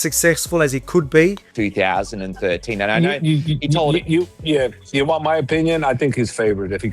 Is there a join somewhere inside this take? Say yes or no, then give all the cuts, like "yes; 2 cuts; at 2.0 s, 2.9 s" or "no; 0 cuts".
yes; 1 cut; at 1.4 s